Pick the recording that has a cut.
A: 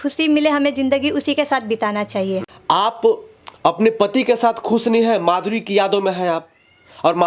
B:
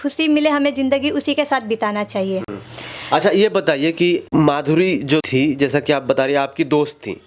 A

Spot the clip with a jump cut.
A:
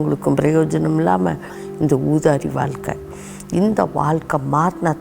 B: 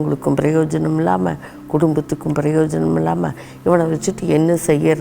A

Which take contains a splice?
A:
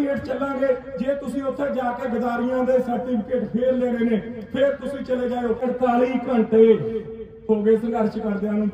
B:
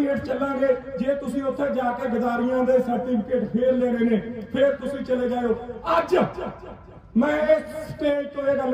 A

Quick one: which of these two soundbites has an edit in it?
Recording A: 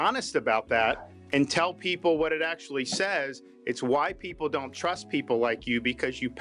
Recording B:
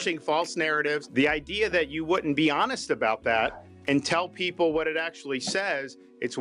B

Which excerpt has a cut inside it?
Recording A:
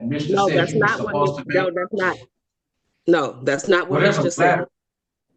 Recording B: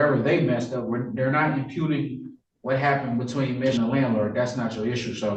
B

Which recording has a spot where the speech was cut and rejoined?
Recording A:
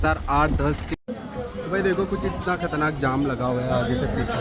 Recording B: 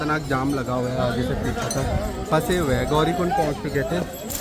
A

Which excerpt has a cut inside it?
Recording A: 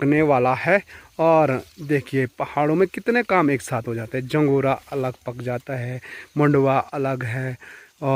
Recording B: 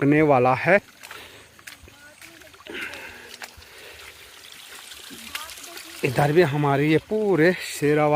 B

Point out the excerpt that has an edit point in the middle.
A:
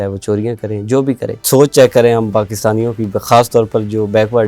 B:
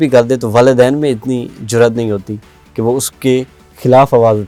A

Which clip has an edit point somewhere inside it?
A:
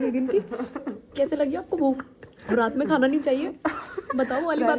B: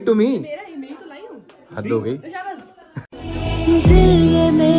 B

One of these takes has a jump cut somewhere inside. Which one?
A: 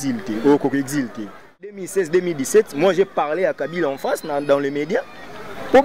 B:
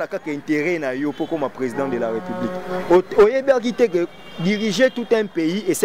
A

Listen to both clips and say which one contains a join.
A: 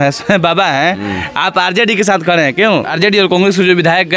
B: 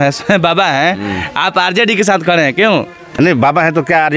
A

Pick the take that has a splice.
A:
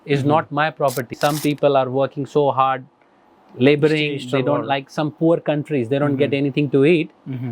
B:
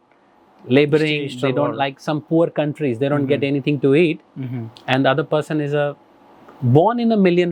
A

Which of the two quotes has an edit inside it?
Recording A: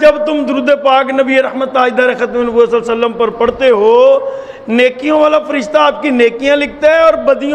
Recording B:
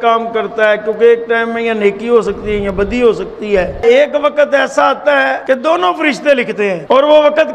B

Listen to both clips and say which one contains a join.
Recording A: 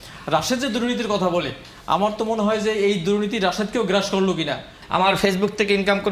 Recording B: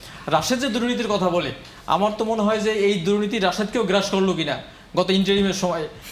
A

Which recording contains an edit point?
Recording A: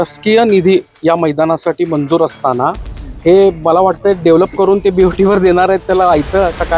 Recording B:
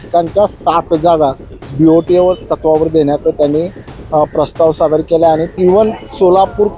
B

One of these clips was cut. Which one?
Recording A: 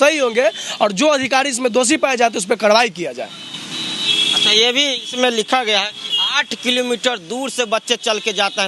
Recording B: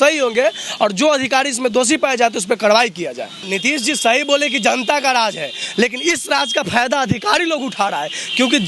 B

